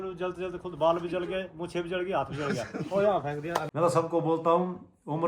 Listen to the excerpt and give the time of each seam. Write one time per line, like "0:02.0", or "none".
0:03.7

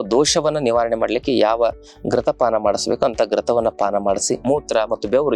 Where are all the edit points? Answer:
0:04.4

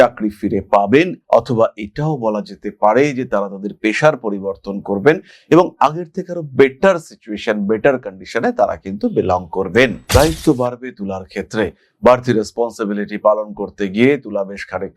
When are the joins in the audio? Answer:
0:10.0

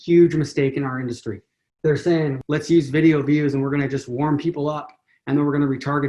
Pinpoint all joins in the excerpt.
0:02.4

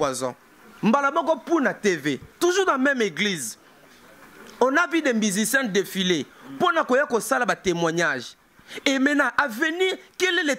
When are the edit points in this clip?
none

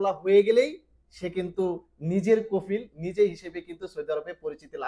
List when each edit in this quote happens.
none

